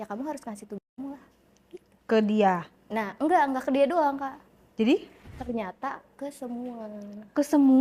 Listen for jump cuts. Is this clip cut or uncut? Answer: cut